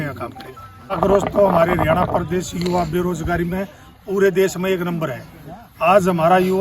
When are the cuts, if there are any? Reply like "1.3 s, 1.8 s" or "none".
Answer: 1.0 s